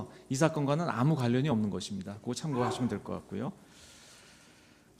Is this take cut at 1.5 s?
yes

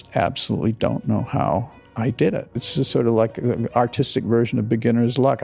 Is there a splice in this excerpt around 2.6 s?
yes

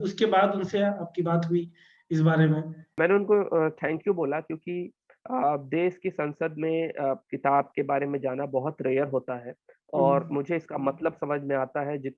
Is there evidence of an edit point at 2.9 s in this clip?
yes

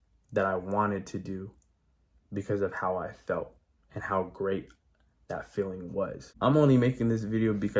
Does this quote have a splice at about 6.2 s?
yes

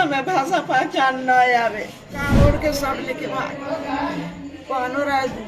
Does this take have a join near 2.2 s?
yes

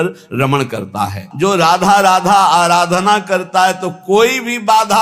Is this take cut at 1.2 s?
yes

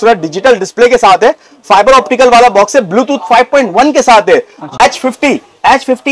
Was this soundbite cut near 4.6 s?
yes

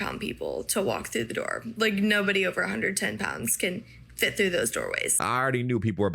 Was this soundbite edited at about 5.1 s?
yes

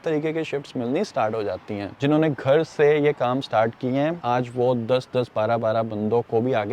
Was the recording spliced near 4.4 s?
no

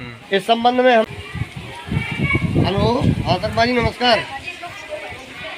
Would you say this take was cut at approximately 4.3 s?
no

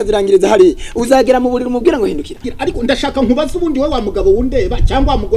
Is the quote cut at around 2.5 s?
yes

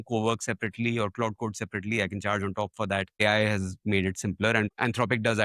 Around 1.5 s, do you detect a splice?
no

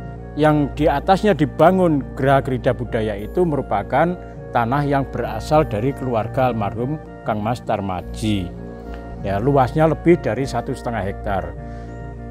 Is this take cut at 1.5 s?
yes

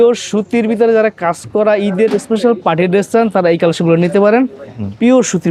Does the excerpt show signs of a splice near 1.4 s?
no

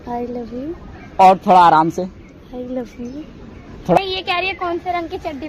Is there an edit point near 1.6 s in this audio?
no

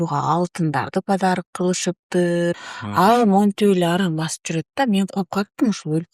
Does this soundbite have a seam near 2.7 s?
yes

